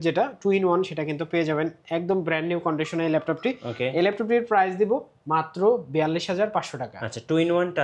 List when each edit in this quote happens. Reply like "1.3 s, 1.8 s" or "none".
none